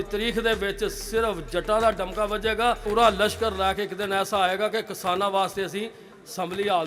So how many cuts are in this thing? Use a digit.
1